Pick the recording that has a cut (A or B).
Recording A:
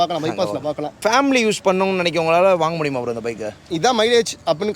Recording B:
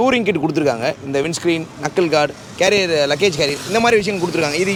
A